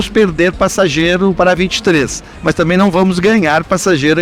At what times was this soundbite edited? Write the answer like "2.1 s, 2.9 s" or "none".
none